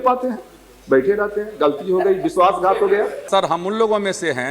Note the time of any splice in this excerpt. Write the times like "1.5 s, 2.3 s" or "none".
3.2 s